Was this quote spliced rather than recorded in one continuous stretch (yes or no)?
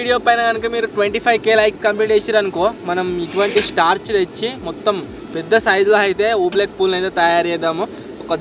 no